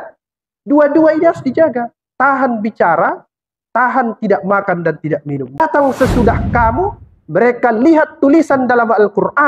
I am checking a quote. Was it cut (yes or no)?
yes